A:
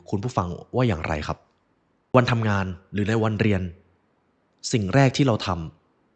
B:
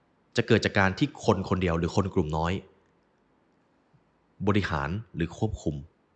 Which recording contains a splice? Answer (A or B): A